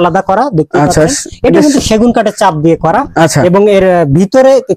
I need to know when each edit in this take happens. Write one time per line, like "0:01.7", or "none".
none